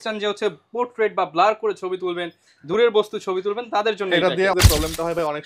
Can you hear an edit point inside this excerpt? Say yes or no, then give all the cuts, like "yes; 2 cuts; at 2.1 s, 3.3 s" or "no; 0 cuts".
yes; 1 cut; at 4.5 s